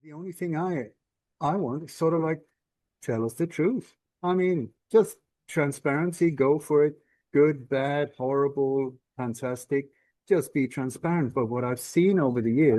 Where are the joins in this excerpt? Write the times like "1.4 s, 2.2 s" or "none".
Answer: none

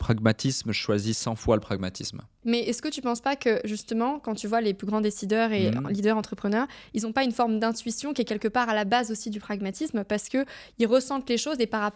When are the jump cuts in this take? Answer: 2.4 s

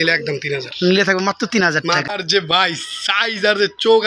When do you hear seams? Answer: 2.1 s

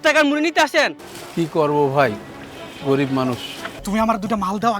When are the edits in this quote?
1.0 s, 3.8 s

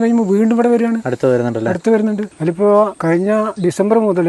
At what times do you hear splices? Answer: 2.3 s, 3.2 s

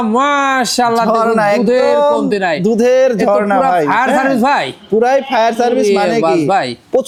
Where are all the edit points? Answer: none

